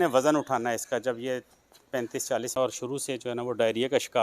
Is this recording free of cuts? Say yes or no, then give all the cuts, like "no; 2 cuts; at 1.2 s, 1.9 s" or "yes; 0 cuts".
no; 1 cut; at 2.3 s